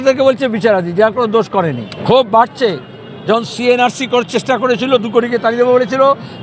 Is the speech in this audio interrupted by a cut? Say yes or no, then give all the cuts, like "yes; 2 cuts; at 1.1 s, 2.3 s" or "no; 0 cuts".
yes; 1 cut; at 1.9 s